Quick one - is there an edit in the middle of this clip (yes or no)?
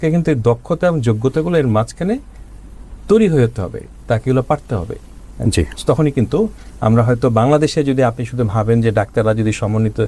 no